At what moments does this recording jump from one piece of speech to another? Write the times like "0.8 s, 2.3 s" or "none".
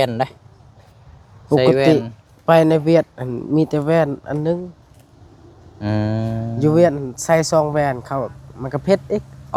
none